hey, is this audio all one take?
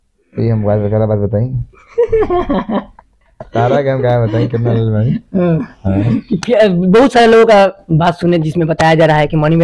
yes; 0 cuts

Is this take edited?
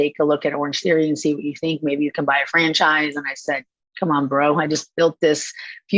no; 0 cuts

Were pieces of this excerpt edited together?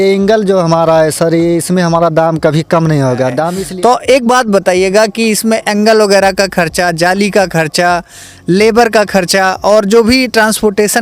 yes; 1 cut; at 3.6 s

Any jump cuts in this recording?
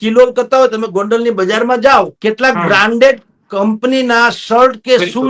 yes; 1 cut; at 2.1 s

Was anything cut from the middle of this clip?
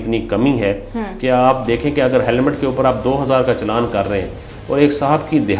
no; 0 cuts

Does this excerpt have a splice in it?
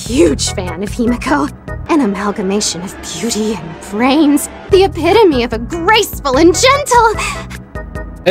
no; 0 cuts

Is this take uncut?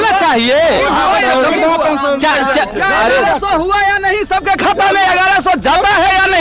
yes; 0 cuts

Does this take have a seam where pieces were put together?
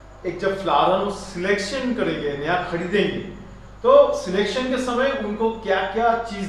no; 0 cuts

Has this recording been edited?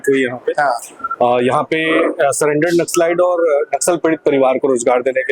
no; 0 cuts

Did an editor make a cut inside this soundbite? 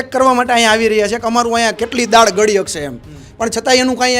no; 0 cuts

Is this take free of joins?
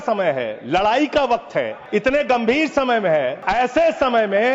no; 2 cuts; at 1.8 s, 3.4 s

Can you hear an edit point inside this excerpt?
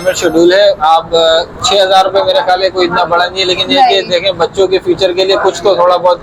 no; 0 cuts

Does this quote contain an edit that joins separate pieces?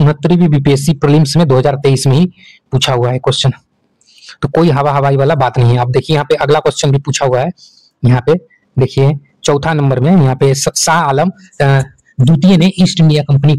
no; 0 cuts

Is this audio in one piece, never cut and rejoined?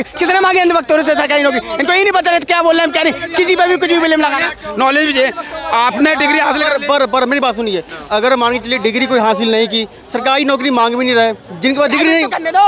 yes; 0 cuts

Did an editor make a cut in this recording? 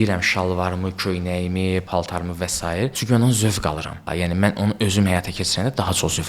yes; 2 cuts; at 1.9 s, 4.0 s

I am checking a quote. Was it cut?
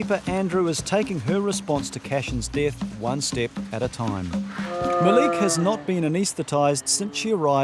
yes; 1 cut; at 4.8 s

